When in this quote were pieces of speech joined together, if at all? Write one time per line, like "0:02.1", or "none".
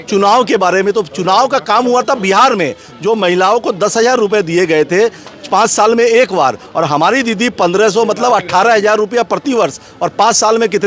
none